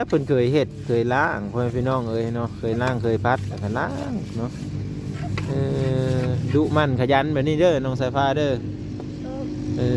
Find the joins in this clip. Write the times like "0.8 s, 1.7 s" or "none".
none